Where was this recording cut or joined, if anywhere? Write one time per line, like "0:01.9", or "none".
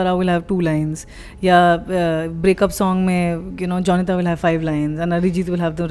none